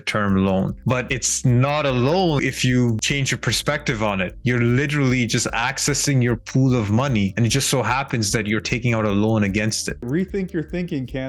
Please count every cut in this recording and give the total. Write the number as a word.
zero